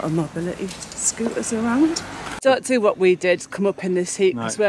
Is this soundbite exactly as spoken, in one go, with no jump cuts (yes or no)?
no